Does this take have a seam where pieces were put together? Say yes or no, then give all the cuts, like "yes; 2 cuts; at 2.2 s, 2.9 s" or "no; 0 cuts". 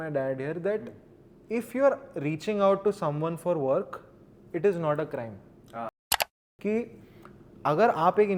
yes; 1 cut; at 6.2 s